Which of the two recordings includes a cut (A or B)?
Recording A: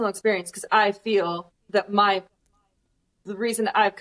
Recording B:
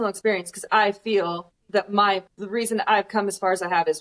B